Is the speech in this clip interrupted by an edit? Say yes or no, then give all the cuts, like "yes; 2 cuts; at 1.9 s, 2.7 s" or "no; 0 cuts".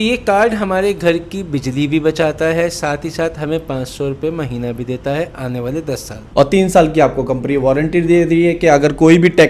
yes; 1 cut; at 6.3 s